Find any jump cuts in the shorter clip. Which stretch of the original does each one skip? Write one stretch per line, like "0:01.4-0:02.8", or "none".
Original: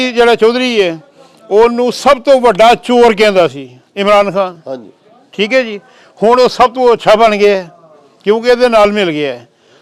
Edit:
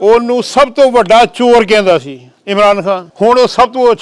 0:04.6-0:06.1